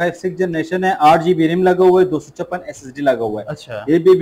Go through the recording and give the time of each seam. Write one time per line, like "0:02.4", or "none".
none